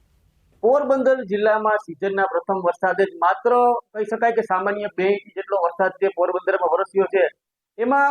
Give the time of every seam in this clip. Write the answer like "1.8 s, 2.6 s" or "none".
1.3 s